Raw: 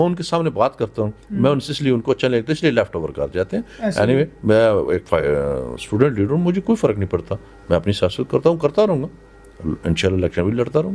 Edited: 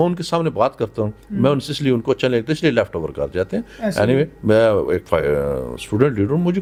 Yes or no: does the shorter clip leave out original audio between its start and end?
no